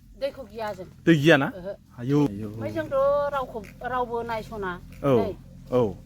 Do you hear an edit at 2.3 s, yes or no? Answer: yes